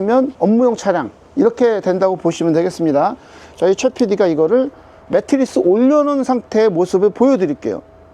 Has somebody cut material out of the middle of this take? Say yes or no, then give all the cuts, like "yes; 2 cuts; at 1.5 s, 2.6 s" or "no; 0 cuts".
yes; 1 cut; at 3.4 s